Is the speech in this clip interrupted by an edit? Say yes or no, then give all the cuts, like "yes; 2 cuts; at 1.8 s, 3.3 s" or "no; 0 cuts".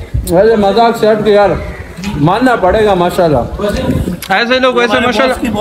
yes; 1 cut; at 3.7 s